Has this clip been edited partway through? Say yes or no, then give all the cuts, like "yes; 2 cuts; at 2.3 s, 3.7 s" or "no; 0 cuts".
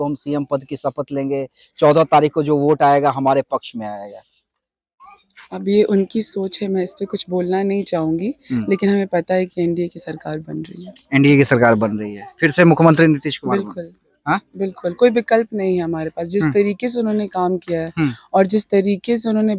no; 0 cuts